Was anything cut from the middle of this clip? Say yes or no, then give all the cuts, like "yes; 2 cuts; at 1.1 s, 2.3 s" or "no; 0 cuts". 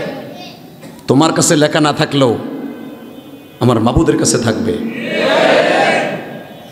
no; 0 cuts